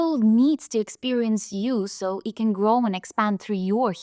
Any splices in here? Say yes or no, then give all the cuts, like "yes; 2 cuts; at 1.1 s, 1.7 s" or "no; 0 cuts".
no; 0 cuts